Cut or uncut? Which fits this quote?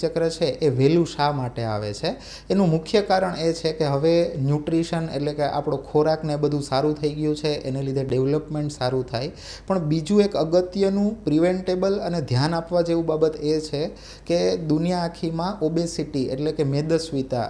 uncut